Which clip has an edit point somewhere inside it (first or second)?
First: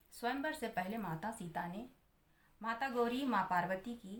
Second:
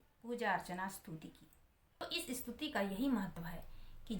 second